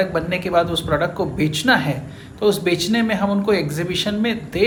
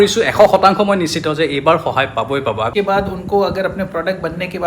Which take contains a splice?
second; 1 cut; at 2.7 s

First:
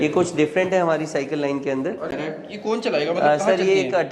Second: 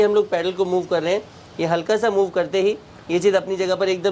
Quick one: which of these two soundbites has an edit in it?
first; 1 cut; at 2.1 s

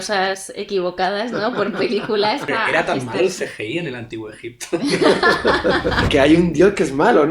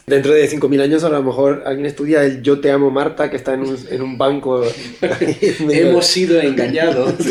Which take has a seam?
first; 2 cuts; at 2.5 s, 6.0 s

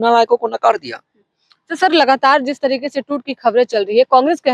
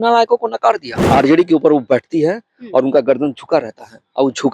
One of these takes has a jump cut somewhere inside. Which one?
second; 1 cut; at 0.9 s

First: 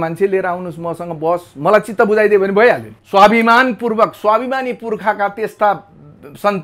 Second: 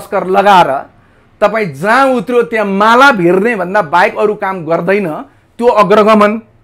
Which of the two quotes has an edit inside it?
first; 1 cut; at 2.9 s

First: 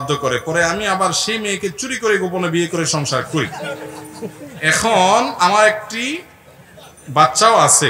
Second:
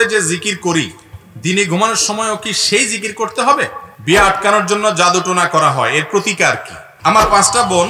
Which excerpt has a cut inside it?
second; 2 cuts; at 3.9 s, 6.9 s

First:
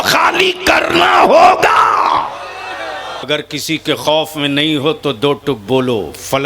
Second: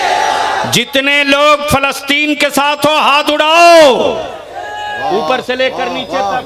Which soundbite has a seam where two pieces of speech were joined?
first; 1 cut; at 3.3 s

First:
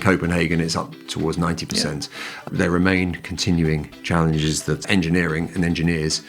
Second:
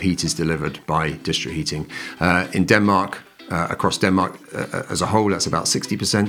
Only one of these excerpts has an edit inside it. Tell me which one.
first; 2 cuts; at 2.4 s, 4.8 s

